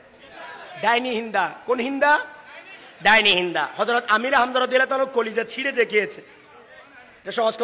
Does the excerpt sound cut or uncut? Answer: uncut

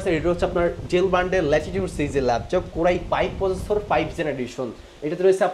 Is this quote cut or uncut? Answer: uncut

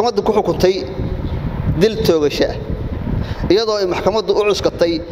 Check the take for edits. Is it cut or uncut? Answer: uncut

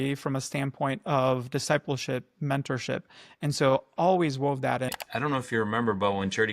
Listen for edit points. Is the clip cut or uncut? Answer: cut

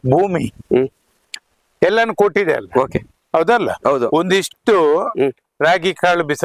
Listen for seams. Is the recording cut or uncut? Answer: uncut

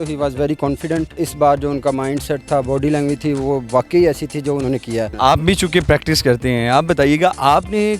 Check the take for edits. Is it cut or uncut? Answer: cut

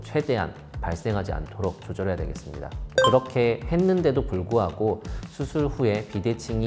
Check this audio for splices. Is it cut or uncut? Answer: uncut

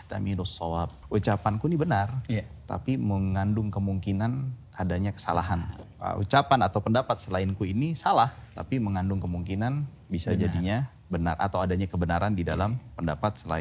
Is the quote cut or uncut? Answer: cut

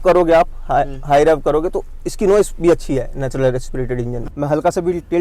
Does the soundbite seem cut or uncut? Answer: cut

